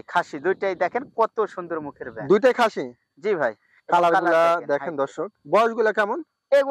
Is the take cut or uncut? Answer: uncut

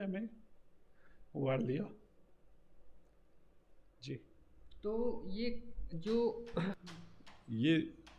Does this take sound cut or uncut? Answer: cut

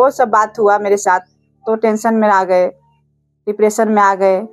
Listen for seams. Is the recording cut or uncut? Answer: uncut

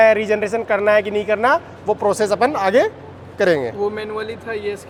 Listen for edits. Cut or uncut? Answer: uncut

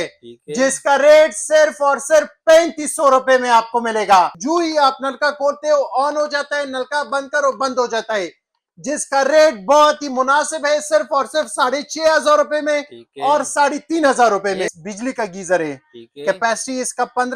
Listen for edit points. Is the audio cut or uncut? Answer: cut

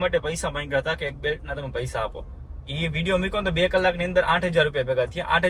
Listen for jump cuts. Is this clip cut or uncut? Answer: uncut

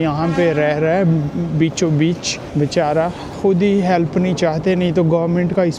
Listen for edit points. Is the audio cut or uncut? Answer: cut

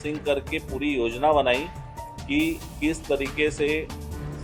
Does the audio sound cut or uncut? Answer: uncut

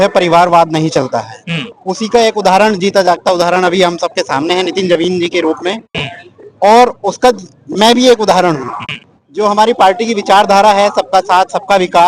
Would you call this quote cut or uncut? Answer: uncut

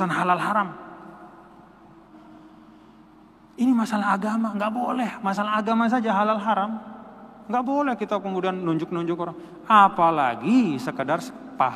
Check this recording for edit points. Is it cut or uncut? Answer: cut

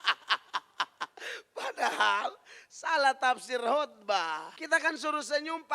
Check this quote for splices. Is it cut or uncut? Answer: cut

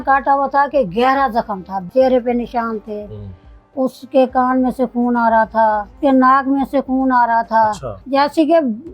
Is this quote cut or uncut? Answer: cut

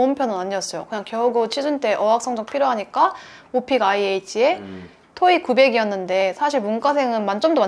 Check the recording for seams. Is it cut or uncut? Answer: uncut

